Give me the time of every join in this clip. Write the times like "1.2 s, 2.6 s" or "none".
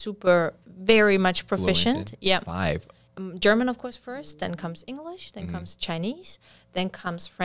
3.0 s